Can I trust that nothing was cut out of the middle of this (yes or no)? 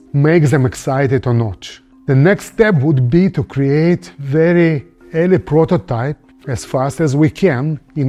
yes